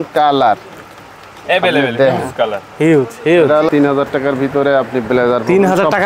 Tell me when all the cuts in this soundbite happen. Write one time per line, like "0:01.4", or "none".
0:03.7